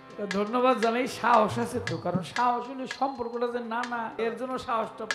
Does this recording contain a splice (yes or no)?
yes